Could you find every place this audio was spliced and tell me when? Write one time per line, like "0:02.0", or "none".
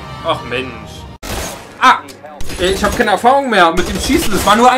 0:01.3

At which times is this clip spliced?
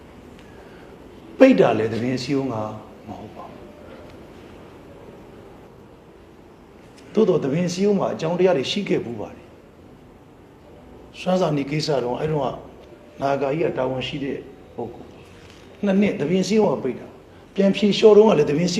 none

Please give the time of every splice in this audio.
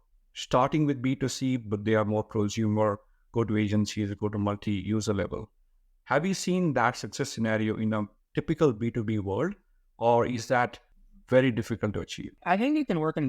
0:12.3

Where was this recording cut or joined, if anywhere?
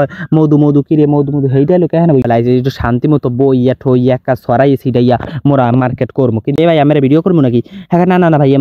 0:02.2
0:06.6

